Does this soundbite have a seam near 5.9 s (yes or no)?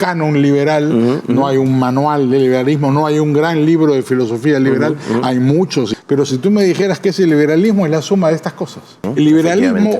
yes